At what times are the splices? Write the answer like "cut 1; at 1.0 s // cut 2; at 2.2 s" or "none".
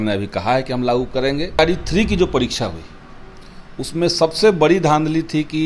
cut 1; at 1.6 s